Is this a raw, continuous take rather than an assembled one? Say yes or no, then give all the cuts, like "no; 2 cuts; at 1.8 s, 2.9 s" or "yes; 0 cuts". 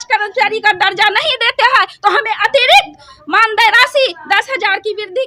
yes; 0 cuts